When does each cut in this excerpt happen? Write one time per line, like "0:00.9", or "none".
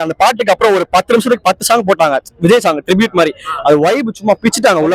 none